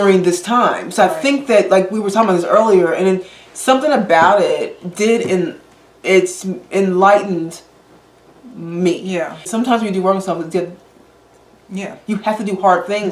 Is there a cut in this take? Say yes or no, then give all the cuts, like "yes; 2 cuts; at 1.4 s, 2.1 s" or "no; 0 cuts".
yes; 1 cut; at 9.4 s